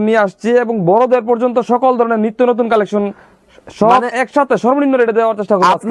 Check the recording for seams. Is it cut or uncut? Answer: uncut